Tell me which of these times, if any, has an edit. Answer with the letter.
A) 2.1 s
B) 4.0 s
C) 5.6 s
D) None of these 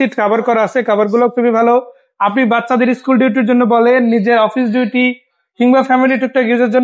D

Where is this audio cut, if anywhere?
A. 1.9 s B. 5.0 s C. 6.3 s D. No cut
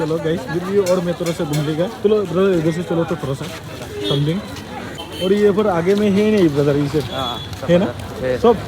B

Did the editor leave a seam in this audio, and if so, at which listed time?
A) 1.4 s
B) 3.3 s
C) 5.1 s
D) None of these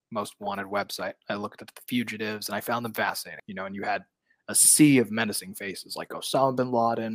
B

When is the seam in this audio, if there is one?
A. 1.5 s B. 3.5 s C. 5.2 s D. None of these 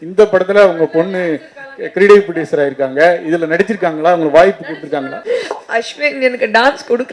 C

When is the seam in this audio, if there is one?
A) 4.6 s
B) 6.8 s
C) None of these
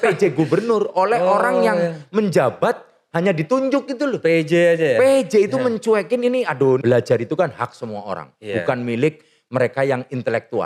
B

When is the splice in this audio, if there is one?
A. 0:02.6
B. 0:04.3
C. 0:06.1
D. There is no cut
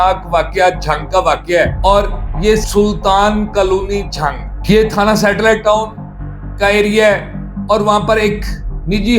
A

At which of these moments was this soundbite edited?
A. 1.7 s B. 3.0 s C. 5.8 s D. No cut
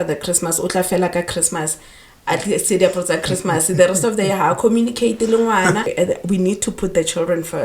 C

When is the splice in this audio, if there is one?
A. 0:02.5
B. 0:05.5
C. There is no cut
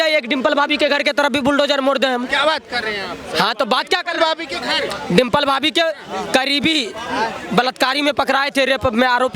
C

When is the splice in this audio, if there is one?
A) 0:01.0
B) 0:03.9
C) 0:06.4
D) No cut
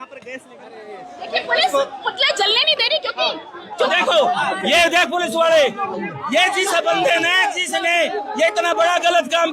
B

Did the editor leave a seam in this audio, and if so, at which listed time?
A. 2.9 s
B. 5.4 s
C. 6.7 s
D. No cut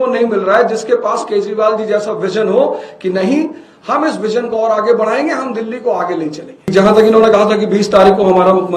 C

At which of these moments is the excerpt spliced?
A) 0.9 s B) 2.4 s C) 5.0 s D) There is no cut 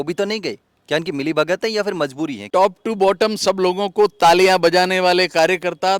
B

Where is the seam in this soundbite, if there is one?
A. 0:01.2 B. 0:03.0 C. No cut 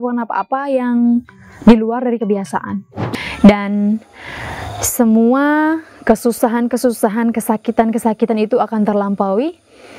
B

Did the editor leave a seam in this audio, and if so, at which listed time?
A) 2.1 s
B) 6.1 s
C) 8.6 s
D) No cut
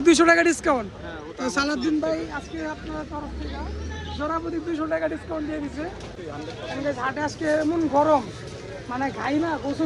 B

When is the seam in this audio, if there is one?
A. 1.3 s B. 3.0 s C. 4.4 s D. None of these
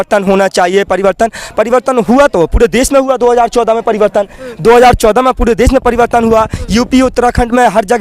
D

